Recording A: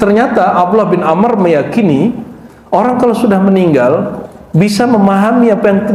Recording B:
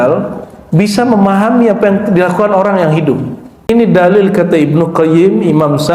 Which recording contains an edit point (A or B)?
B